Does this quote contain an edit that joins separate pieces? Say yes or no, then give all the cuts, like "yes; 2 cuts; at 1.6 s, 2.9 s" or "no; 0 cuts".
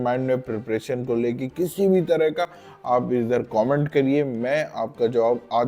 no; 0 cuts